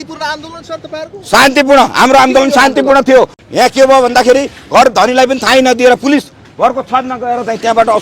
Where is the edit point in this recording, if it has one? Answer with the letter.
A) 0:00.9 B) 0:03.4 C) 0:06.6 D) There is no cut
B